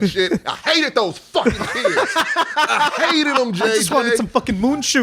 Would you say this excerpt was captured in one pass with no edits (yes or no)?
yes